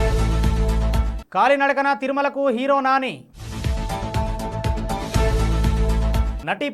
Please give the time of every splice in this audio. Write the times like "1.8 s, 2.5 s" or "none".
0.9 s